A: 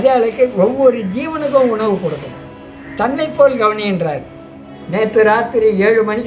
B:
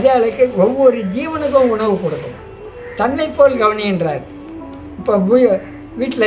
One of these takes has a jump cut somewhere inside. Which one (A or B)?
A